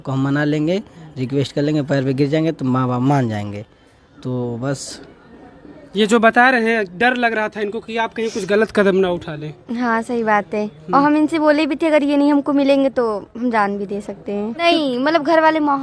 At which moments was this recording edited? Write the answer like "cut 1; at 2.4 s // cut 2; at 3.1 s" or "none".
cut 1; at 14.6 s